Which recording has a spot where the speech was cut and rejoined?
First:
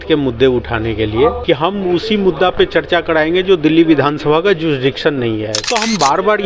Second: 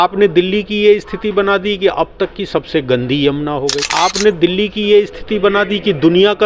first; 2 cuts; at 1.4 s, 5.6 s

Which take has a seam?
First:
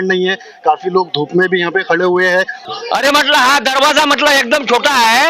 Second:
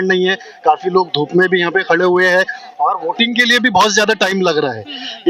first; 1 cut; at 2.6 s

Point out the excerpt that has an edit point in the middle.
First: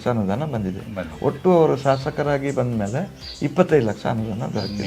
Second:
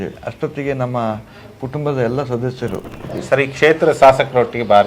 second; 1 cut; at 3.1 s

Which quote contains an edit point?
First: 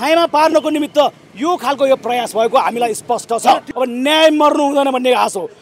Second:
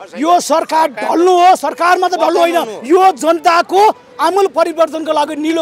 first; 1 cut; at 3.7 s

